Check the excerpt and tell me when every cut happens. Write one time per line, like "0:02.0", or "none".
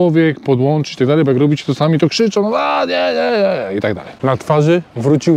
0:04.1

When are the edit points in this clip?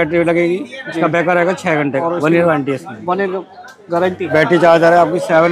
0:02.0
0:04.3

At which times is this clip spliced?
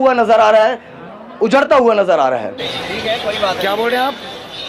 none

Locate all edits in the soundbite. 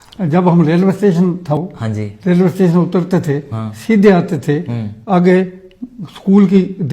0:01.5

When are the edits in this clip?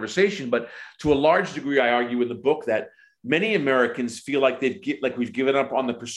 none

